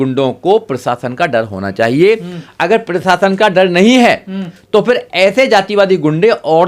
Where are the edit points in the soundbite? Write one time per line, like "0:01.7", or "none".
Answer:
none